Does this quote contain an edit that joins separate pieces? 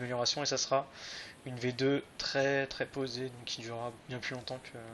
yes; 1 cut; at 3.1 s

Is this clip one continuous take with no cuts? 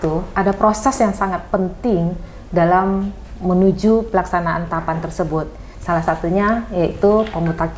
yes; 0 cuts

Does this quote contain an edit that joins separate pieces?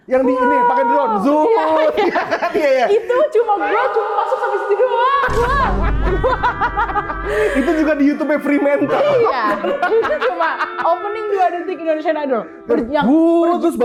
no; 0 cuts

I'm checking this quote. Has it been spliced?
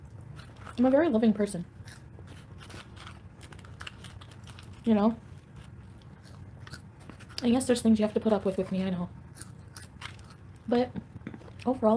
no; 0 cuts

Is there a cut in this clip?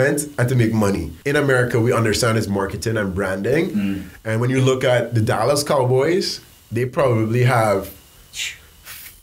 yes; 1 cut; at 1.1 s

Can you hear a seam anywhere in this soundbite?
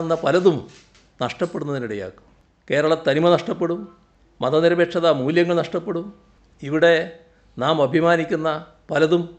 no; 0 cuts

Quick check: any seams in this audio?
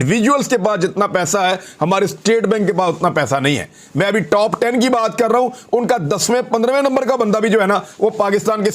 no; 0 cuts

